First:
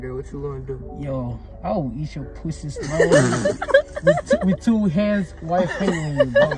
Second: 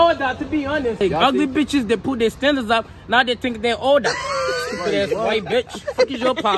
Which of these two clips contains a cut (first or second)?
second